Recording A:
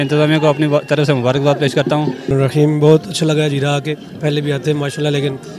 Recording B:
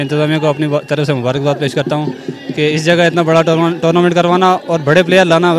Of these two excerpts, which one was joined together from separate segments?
A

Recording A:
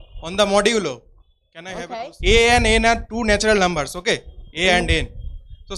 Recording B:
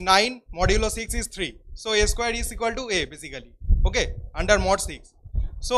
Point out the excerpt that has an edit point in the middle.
A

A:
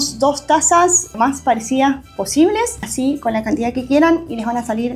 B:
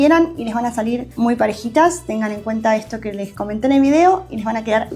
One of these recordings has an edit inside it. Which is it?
A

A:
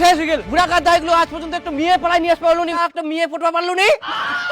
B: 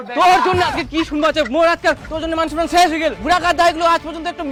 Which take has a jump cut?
A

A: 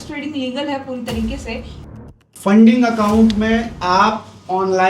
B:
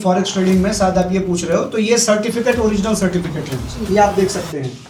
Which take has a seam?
A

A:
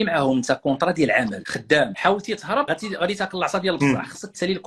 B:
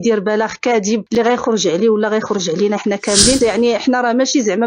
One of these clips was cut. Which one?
B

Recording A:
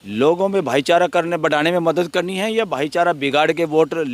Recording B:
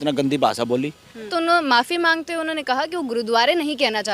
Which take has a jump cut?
B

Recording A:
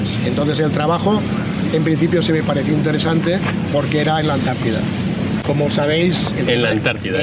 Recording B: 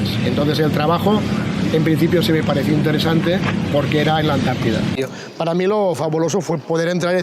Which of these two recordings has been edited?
B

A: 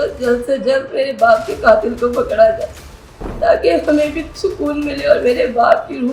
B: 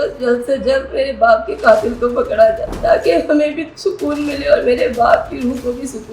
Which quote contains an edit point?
B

